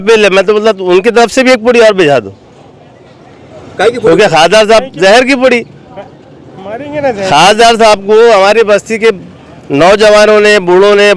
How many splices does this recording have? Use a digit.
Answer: 0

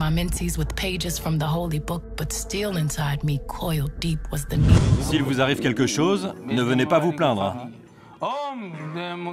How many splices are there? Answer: 1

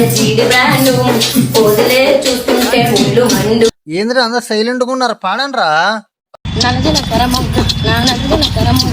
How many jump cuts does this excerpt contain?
1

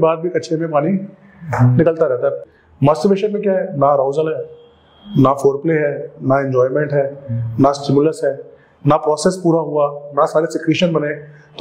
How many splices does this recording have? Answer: 1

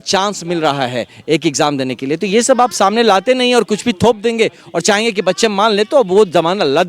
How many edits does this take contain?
0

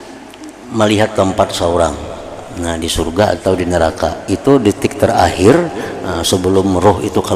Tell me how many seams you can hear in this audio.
0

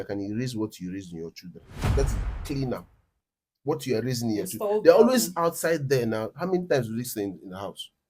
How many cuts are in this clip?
1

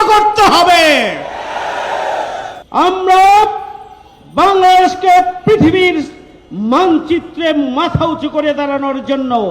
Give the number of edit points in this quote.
1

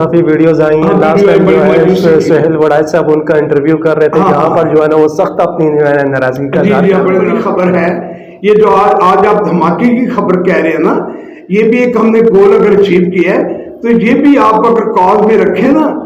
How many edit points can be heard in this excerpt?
1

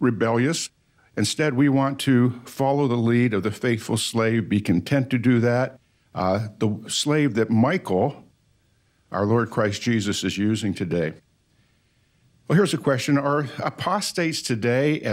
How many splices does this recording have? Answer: 1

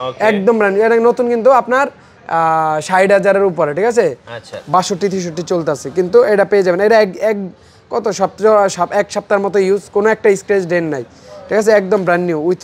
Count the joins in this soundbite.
0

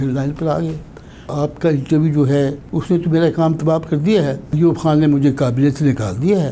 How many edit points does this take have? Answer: 3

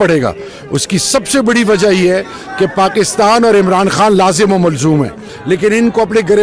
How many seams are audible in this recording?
1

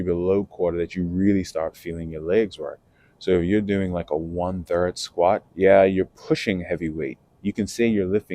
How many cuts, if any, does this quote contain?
1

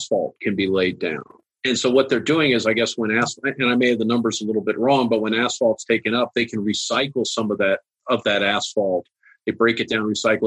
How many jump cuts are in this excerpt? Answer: 1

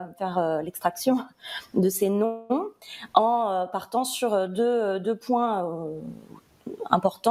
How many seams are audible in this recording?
0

